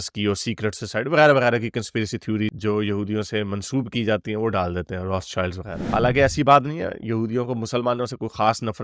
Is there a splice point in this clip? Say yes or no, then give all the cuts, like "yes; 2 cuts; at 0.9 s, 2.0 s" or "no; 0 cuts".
yes; 1 cut; at 5.8 s